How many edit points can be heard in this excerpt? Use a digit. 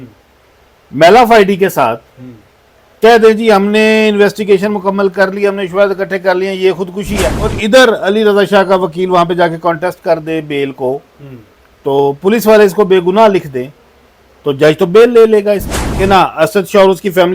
2